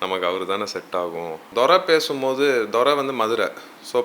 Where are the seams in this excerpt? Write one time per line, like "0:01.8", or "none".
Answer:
0:01.5